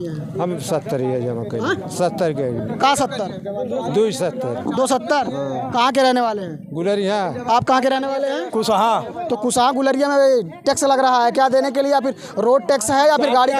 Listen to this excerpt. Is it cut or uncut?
uncut